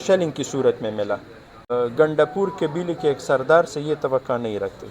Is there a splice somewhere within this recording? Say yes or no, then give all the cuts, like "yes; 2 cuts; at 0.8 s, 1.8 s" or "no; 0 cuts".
yes; 1 cut; at 1.7 s